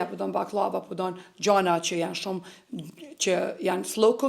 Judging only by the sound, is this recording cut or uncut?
uncut